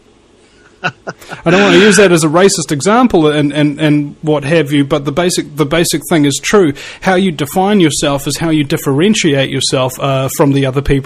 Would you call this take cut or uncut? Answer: uncut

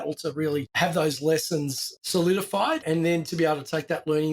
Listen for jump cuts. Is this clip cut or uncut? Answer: cut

